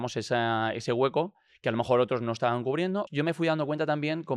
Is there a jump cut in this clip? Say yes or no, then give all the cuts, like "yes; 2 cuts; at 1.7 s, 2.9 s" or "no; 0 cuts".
yes; 1 cut; at 3.1 s